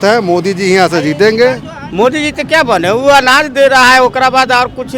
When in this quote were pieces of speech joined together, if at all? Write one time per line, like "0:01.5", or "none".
0:01.7